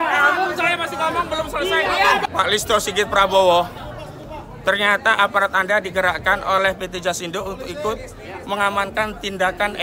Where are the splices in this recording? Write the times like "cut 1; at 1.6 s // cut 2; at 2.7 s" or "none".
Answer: cut 1; at 2.2 s